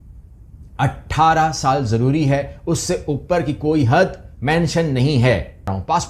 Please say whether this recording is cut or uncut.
uncut